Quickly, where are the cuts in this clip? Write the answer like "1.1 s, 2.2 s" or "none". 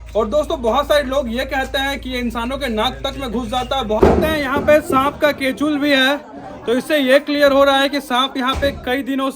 4.0 s